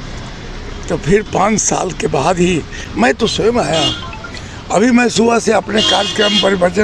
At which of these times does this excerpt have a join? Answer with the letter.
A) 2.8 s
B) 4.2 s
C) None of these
A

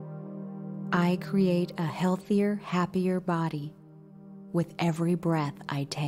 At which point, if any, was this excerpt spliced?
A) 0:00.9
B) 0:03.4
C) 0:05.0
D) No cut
A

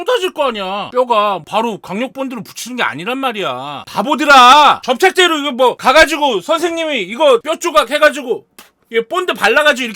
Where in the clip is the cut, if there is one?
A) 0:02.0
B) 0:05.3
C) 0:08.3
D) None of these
D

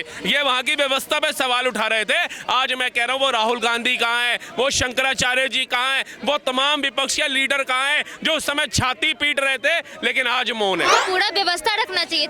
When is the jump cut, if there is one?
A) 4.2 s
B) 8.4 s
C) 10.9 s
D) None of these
C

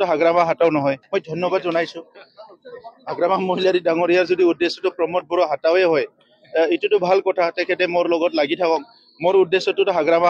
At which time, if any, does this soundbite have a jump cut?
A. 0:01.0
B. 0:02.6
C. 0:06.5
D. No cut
A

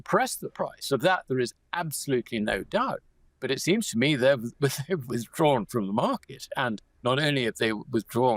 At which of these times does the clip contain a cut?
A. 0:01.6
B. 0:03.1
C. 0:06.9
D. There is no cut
C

